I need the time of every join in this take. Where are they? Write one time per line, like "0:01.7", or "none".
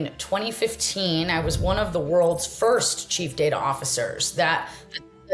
none